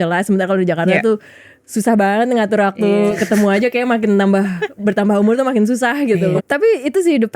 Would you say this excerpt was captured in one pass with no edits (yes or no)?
no